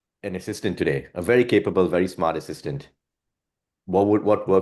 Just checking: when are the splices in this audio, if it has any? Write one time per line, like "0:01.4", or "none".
none